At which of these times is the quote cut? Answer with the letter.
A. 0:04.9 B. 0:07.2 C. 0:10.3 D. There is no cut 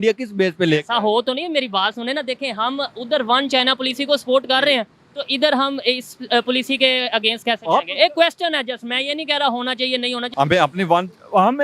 C